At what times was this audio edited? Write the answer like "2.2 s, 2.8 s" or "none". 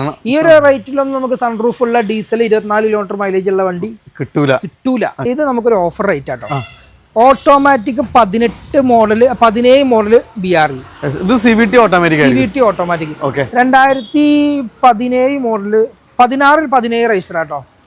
5.2 s